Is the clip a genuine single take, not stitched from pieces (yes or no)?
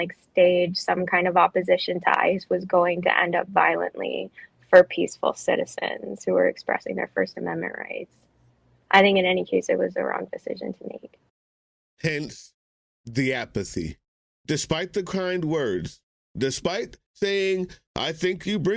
yes